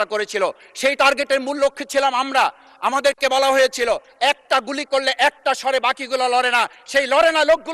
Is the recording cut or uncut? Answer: uncut